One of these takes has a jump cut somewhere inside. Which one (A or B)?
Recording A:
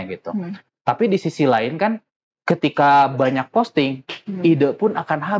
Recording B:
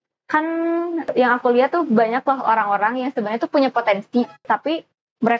B